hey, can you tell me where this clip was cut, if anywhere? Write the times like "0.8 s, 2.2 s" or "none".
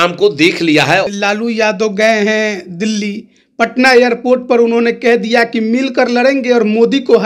1.1 s